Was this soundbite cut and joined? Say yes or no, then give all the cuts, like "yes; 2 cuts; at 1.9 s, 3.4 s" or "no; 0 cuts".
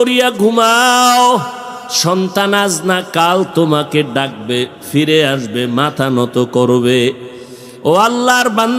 no; 0 cuts